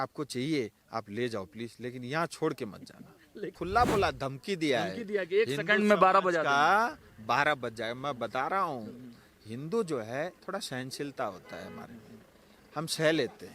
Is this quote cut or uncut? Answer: cut